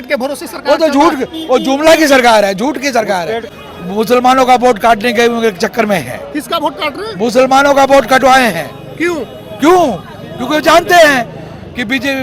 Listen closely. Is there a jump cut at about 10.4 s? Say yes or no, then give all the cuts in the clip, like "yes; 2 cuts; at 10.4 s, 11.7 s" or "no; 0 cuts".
no; 1 cut; at 3.4 s